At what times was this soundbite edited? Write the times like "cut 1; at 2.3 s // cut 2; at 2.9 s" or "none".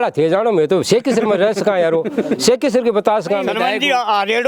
cut 1; at 3.5 s

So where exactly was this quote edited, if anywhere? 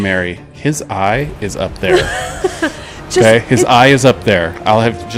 none

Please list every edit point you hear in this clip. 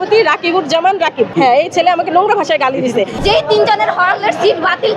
cut 1; at 1.3 s // cut 2; at 3.2 s

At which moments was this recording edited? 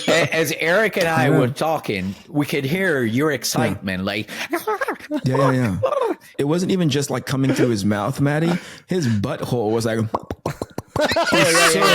cut 1; at 6.3 s

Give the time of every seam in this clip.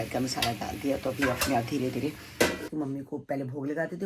cut 1; at 2.6 s

